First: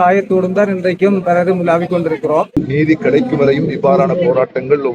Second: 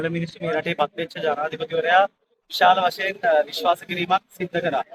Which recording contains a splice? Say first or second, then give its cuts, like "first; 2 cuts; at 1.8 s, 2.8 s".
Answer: first; 1 cut; at 2.6 s